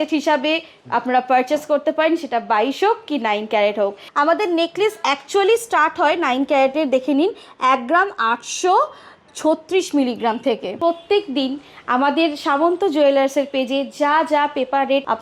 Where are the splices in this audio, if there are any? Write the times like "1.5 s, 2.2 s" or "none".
4.0 s, 10.7 s